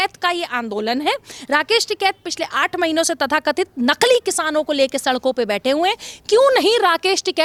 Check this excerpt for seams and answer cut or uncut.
uncut